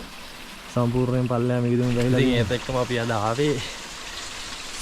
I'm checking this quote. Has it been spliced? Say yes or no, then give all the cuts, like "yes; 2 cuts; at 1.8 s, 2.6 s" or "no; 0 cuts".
yes; 1 cut; at 2.3 s